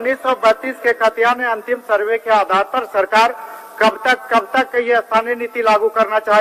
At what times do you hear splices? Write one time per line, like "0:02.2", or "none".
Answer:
none